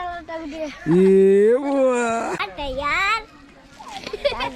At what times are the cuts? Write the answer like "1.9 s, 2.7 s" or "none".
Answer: 2.4 s